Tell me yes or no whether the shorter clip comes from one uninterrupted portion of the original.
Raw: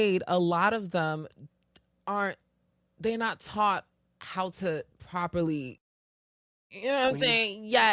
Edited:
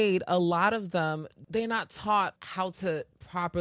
no